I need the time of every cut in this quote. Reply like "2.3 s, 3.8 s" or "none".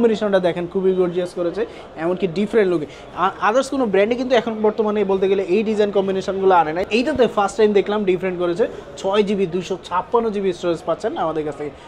6.8 s